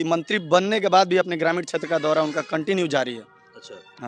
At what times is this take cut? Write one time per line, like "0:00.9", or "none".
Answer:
none